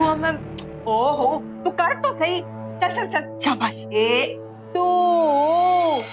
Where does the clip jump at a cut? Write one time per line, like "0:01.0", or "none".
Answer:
0:03.8